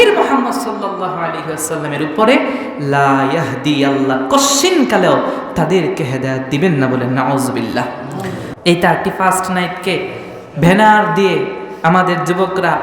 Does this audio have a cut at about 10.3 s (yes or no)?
no